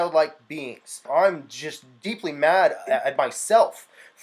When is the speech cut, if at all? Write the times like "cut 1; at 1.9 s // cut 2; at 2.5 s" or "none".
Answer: cut 1; at 1.0 s